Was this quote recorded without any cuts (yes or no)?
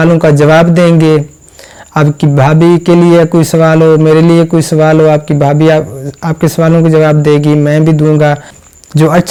yes